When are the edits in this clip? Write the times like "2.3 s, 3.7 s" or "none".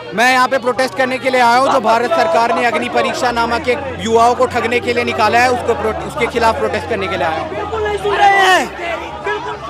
none